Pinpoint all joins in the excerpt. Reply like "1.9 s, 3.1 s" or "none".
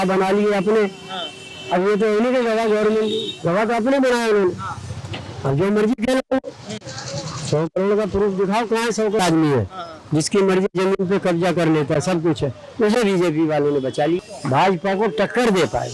9.2 s, 14.3 s

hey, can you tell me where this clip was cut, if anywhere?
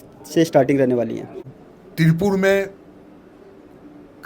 1.5 s

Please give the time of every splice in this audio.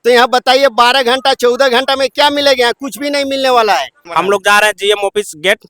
4.0 s

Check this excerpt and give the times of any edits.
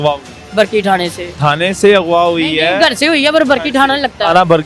1.2 s

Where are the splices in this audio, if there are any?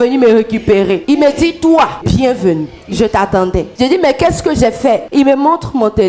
1.0 s, 2.0 s, 3.7 s, 5.1 s

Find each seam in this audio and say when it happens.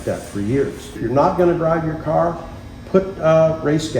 1.0 s

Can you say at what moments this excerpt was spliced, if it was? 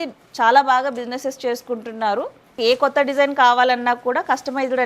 2.5 s

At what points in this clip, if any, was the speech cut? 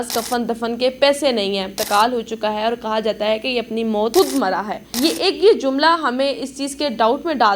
1.7 s, 4.1 s, 4.8 s

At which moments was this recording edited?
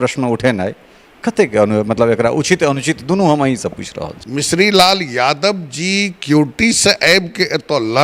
4.2 s

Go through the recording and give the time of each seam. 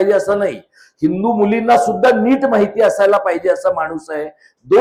none

